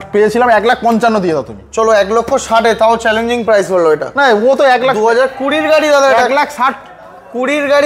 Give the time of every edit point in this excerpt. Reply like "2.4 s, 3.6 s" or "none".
none